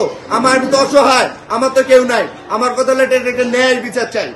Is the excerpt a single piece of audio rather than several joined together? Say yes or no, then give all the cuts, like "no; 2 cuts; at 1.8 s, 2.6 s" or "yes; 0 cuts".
yes; 0 cuts